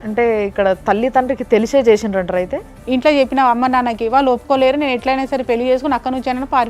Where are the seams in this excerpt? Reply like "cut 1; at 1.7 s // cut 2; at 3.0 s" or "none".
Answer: cut 1; at 2.7 s